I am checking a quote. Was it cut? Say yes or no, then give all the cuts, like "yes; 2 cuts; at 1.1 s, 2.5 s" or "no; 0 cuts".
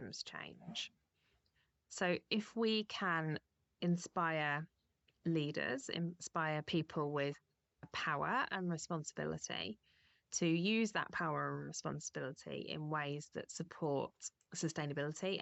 no; 0 cuts